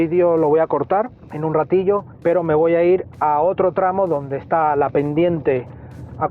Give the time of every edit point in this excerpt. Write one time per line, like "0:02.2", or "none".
0:01.2
0:02.1